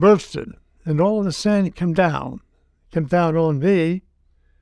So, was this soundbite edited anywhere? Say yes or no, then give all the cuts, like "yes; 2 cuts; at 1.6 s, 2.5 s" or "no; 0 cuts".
no; 0 cuts